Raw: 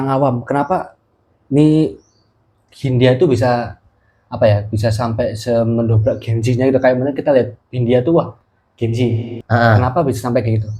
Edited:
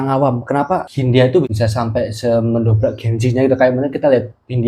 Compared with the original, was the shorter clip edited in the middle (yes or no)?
yes